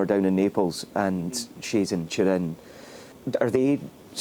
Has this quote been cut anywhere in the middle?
yes; 1 cut; at 3.1 s

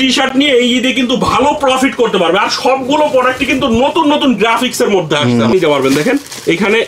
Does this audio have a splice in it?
yes; 1 cut; at 5.5 s

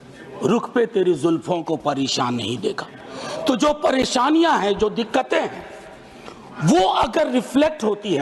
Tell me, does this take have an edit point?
no; 0 cuts

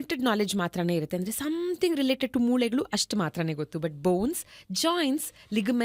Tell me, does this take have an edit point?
no; 0 cuts

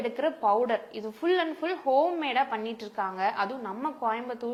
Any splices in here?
no; 0 cuts

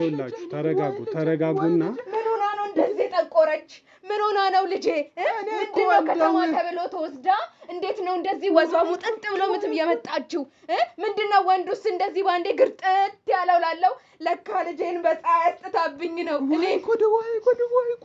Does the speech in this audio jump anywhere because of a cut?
no; 0 cuts

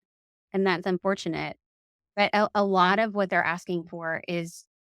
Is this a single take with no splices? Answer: no; 1 cut; at 2.0 s

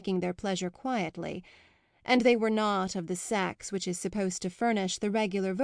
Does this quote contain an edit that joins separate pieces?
no; 0 cuts

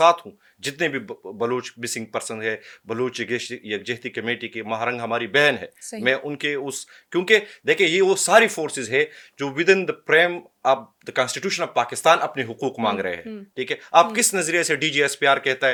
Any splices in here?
no; 0 cuts

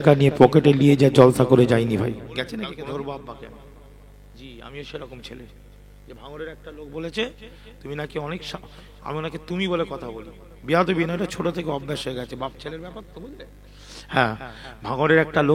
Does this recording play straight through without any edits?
no; 1 cut; at 2.7 s

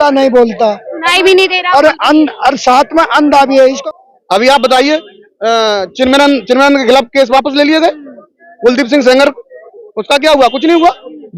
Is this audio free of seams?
no; 1 cut; at 3.8 s

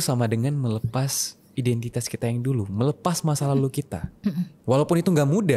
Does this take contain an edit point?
no; 0 cuts

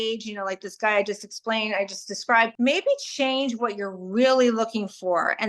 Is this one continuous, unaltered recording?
no; 1 cut; at 2.5 s

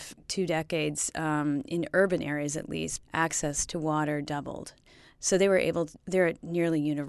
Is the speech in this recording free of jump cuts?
yes; 0 cuts

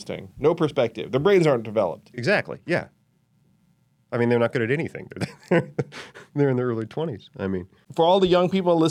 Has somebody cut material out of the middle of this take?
no; 0 cuts

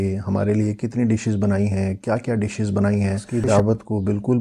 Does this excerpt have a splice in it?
yes; 1 cut; at 3.2 s

